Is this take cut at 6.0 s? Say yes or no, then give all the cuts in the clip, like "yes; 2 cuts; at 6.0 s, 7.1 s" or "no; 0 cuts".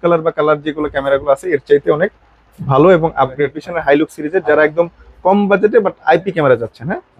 no; 1 cut; at 3.6 s